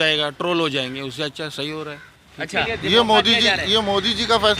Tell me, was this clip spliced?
yes; 1 cut; at 2.7 s

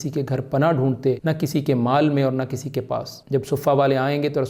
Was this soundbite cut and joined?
yes; 2 cuts; at 1.2 s, 3.1 s

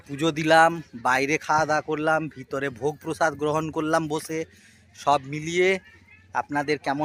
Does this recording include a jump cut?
no; 0 cuts

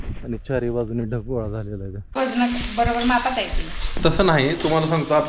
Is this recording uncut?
no; 1 cut; at 2.2 s

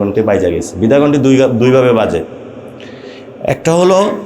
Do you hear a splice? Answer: no; 0 cuts

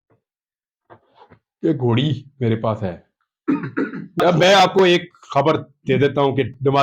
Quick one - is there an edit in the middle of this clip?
yes; 1 cut; at 4.2 s

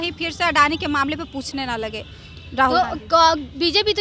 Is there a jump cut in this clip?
no; 0 cuts

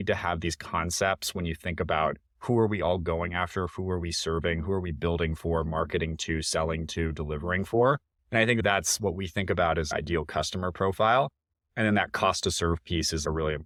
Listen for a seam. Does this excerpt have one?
no; 0 cuts

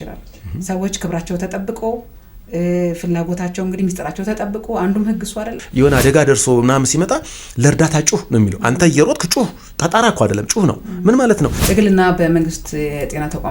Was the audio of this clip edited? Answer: yes; 2 cuts; at 5.6 s, 11.6 s

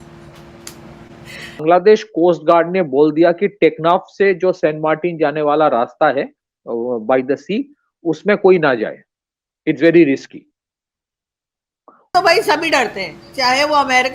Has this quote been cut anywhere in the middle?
yes; 2 cuts; at 1.6 s, 12.1 s

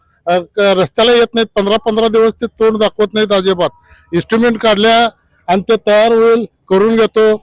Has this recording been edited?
no; 0 cuts

